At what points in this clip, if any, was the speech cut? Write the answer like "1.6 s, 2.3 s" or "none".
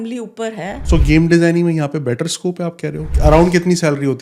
0.8 s, 3.1 s